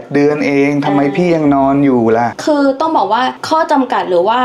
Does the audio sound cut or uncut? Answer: cut